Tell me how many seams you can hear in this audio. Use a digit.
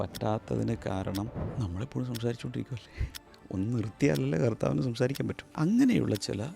2